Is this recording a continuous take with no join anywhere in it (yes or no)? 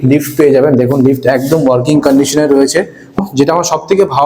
no